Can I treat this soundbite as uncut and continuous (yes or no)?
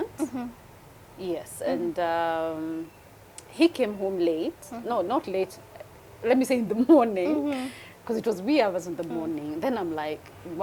yes